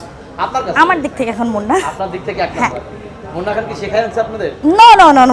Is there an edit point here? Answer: no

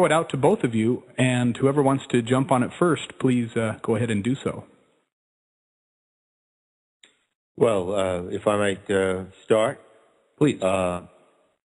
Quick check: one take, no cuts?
no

